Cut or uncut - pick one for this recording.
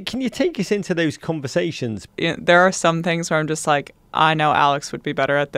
cut